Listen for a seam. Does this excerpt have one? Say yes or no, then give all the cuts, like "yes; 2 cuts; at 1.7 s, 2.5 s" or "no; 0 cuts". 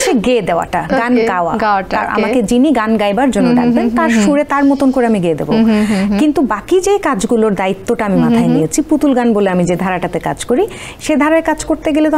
no; 0 cuts